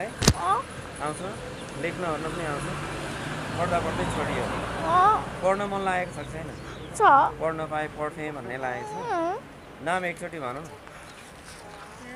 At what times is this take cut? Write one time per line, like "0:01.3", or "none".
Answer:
none

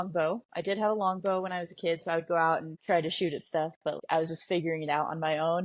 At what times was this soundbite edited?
0:02.7
0:04.0

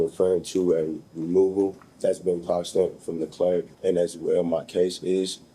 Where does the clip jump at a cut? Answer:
0:01.9
0:03.7

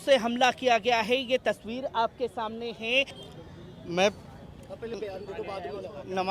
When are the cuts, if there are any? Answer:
0:03.2

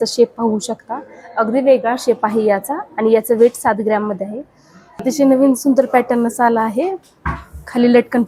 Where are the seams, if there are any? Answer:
0:05.0

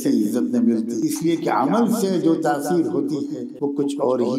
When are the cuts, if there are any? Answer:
0:00.9
0:03.4

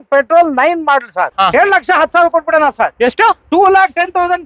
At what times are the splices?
0:01.3

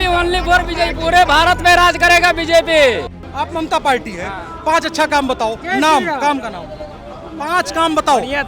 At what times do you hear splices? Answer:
0:03.1

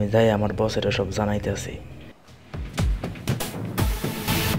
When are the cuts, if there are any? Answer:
0:02.2

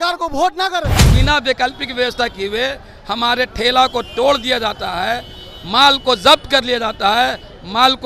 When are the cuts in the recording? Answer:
0:01.1

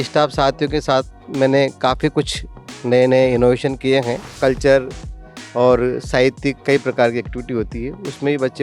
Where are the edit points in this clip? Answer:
0:04.3

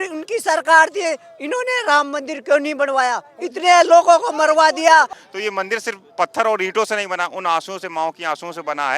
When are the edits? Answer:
0:05.2

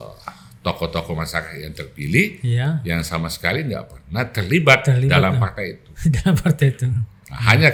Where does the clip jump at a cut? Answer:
none

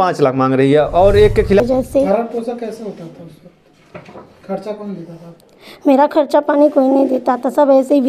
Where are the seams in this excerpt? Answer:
0:01.6

